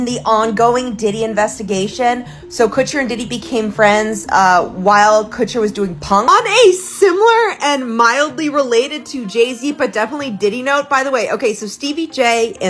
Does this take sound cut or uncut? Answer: cut